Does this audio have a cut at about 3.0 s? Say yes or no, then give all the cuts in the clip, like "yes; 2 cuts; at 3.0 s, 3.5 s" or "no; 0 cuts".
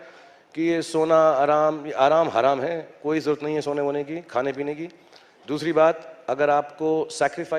no; 0 cuts